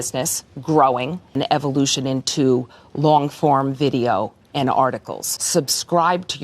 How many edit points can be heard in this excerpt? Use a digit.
1